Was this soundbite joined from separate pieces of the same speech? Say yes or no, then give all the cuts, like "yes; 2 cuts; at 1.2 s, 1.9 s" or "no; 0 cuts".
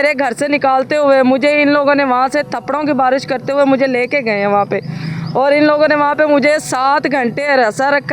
no; 0 cuts